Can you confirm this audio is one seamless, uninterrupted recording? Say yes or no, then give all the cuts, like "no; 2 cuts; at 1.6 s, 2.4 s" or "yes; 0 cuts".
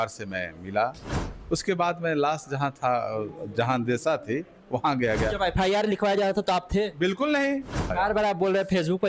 no; 1 cut; at 7.9 s